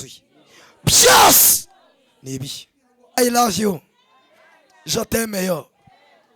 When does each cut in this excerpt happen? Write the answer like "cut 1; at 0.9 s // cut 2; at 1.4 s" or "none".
cut 1; at 3.1 s

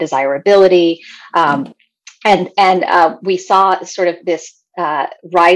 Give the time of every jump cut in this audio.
none

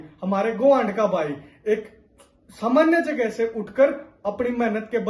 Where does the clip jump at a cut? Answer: none

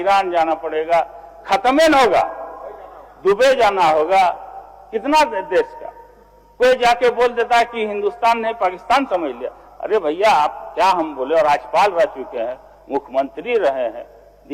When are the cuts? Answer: none

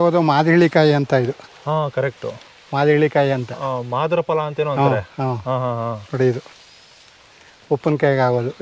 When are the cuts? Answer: none

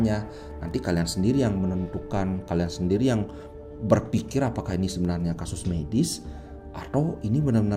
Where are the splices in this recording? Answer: none

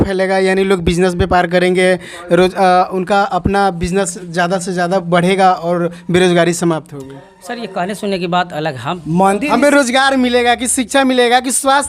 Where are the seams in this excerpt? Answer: cut 1; at 9.0 s

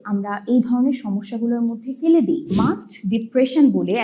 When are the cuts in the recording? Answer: cut 1; at 2.5 s

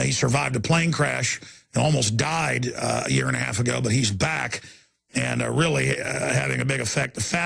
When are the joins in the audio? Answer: none

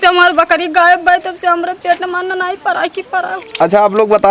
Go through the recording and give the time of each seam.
none

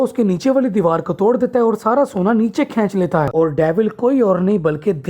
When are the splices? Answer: cut 1; at 3.3 s

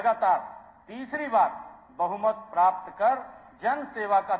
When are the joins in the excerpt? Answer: none

